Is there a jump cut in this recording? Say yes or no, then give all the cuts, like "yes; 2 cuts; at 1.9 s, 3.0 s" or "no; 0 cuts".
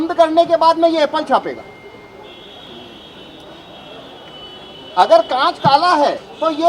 yes; 1 cut; at 2.7 s